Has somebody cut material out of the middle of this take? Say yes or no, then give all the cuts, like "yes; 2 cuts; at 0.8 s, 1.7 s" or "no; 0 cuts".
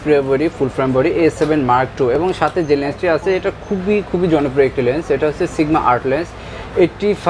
no; 0 cuts